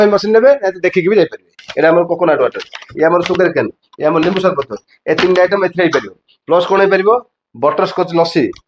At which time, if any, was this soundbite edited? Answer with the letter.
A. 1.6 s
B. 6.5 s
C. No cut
A